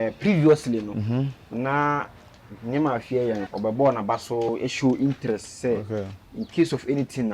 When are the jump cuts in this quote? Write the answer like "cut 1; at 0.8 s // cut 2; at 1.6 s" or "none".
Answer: cut 1; at 3.5 s